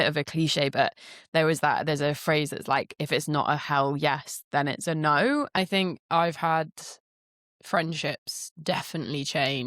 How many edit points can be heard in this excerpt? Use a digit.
1